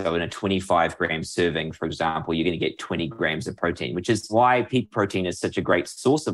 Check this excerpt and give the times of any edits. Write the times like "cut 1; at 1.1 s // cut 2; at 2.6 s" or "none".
cut 1; at 4.3 s

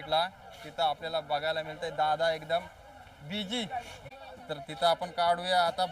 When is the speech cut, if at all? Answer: cut 1; at 4.1 s

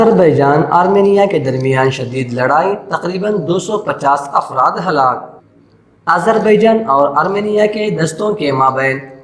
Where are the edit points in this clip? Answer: none

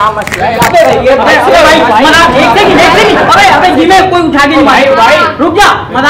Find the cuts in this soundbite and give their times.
none

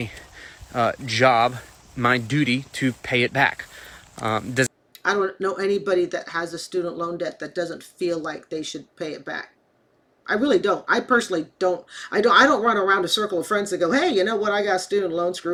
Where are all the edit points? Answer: none

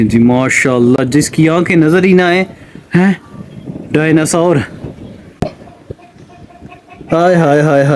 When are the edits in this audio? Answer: none

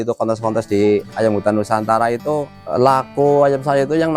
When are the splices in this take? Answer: none

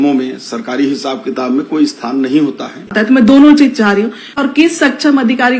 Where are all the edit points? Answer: cut 1; at 2.9 s // cut 2; at 4.4 s

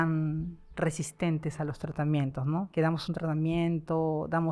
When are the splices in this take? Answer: cut 1; at 2.7 s

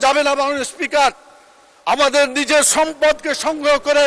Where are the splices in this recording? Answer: none

